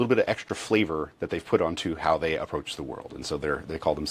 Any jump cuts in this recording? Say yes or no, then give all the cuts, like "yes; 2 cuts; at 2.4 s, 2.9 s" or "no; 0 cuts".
no; 0 cuts